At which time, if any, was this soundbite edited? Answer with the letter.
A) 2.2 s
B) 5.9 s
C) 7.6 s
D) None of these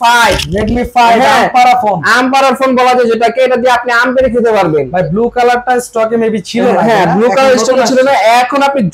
D